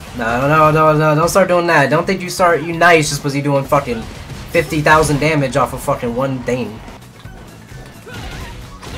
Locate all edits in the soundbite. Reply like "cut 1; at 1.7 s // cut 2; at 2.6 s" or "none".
cut 1; at 7.0 s